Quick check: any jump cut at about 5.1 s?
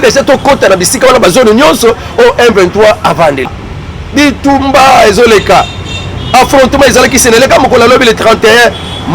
no; 1 cut; at 3.6 s

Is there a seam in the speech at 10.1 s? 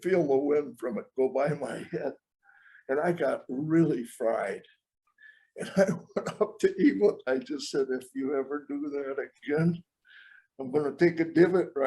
no; 1 cut; at 7.2 s

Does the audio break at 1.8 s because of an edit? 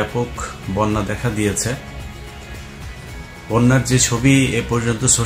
no; 0 cuts

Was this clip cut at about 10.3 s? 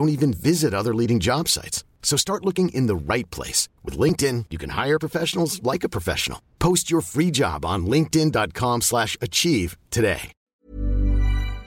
yes; 1 cut; at 10.3 s

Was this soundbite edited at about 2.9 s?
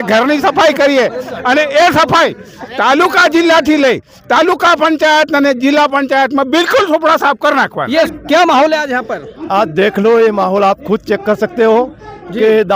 no; 1 cut; at 8.1 s

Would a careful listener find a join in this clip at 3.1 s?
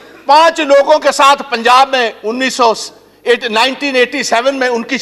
no; 0 cuts

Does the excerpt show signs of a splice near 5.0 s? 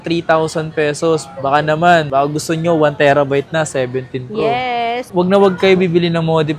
yes; 1 cut; at 5.0 s

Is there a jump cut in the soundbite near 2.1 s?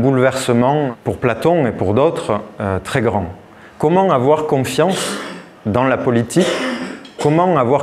no; 1 cut; at 0.9 s

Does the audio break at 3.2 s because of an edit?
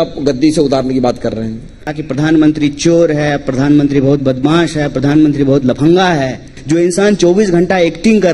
no; 2 cuts; at 1.9 s, 6.5 s

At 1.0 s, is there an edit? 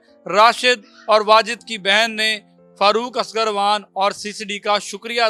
no; 0 cuts

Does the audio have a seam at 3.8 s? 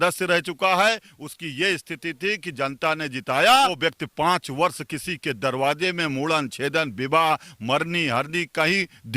yes; 1 cut; at 3.8 s

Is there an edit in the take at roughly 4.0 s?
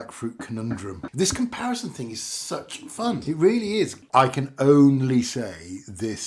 yes; 3 cuts; at 1.0 s, 3.2 s, 4.0 s

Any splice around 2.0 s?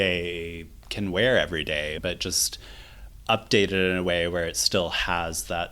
yes; 1 cut; at 2.0 s

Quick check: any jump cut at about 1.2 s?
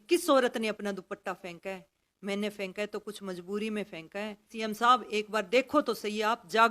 no; 1 cut; at 4.5 s

